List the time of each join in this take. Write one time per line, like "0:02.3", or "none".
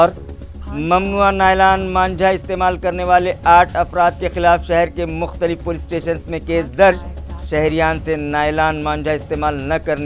none

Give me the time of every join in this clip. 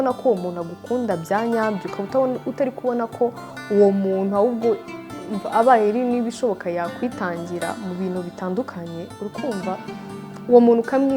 none

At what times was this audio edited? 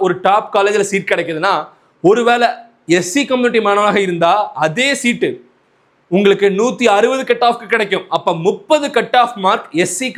none

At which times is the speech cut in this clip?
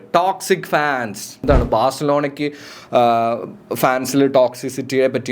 0:01.4

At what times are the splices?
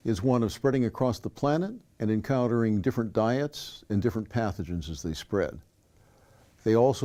none

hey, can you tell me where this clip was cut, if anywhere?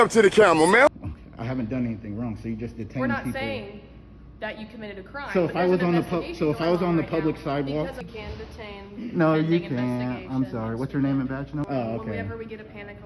0:00.9
0:08.1
0:11.6

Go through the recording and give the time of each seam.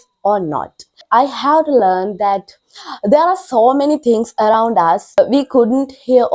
0:01.0
0:05.2

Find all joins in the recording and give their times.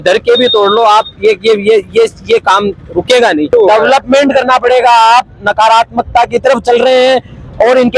0:03.5

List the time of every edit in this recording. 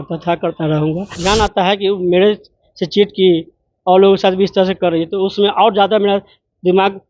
0:01.2

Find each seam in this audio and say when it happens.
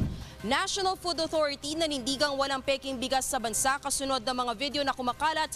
none

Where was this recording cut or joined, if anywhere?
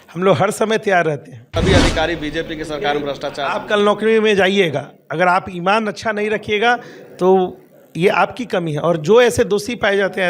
0:01.5

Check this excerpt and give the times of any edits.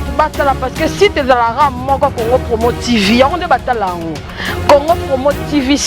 none

